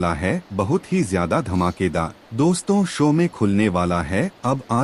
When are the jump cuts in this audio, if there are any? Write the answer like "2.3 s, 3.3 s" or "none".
2.2 s